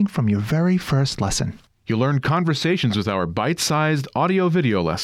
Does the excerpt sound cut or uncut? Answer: uncut